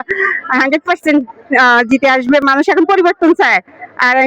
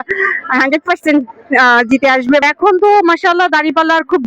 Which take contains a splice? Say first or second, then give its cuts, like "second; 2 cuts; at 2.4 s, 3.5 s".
second; 1 cut; at 2.4 s